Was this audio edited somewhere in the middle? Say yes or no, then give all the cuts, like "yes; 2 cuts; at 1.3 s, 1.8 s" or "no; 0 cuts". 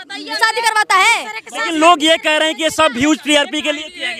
no; 0 cuts